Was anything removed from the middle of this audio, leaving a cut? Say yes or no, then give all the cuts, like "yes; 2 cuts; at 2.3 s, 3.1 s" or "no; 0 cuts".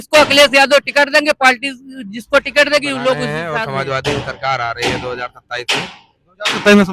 yes; 1 cut; at 3.4 s